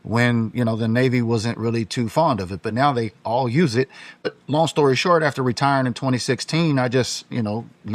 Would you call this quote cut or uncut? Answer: cut